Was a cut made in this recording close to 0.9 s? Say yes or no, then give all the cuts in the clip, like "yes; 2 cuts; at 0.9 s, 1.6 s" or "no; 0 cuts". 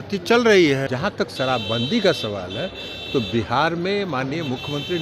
yes; 1 cut; at 0.9 s